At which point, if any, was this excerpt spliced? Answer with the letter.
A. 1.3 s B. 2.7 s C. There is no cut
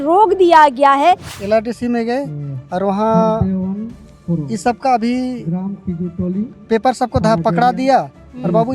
A